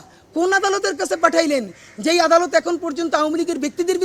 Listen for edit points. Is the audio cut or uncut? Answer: uncut